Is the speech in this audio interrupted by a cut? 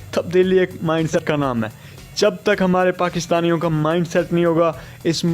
yes; 1 cut; at 1.2 s

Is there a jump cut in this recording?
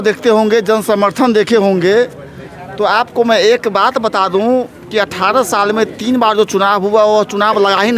no; 0 cuts

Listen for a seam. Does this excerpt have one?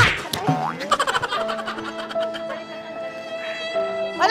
no; 0 cuts

